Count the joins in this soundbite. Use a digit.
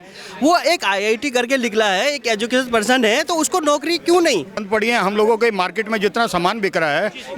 1